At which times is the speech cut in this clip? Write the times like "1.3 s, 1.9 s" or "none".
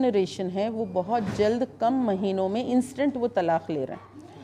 none